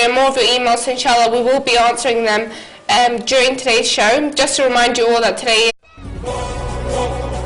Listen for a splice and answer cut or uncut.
uncut